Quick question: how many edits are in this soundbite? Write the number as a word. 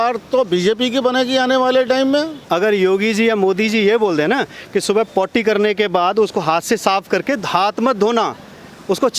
one